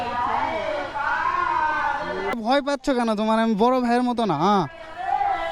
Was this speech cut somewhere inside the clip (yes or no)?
yes